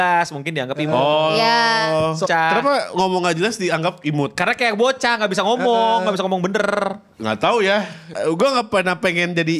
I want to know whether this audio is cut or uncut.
cut